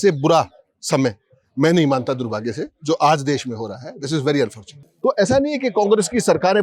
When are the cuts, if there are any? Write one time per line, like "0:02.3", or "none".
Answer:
0:04.7

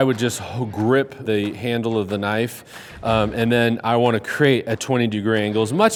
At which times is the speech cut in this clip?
none

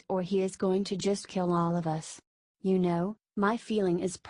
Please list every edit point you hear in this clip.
0:01.9

